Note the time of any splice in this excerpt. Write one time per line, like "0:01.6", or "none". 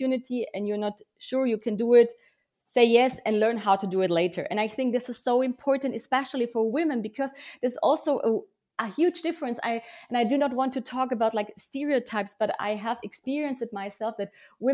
none